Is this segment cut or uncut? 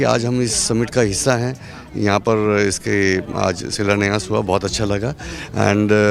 uncut